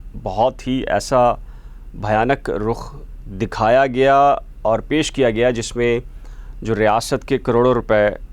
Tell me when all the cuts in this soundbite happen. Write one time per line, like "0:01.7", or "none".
none